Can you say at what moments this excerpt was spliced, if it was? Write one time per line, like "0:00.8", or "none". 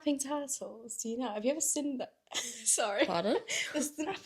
none